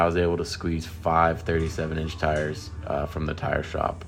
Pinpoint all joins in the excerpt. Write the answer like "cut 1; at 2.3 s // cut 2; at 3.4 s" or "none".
none